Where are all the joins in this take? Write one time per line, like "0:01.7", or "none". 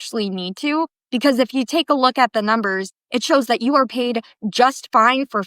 none

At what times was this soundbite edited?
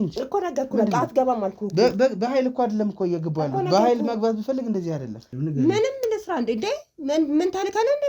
0:05.3

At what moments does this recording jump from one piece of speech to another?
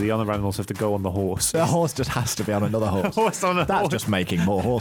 0:01.5

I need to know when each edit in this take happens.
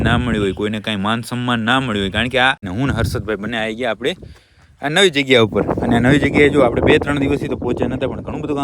0:02.7

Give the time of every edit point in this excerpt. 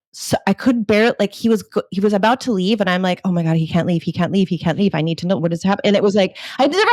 none

